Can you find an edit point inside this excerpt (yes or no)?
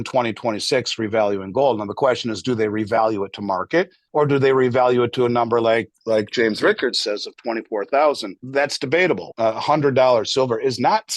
yes